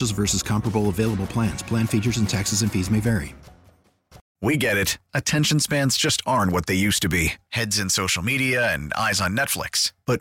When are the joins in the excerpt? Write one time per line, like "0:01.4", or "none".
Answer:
0:04.2